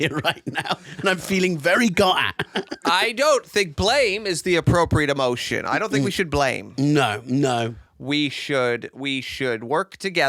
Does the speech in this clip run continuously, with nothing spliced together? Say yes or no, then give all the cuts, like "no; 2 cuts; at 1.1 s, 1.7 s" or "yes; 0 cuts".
yes; 0 cuts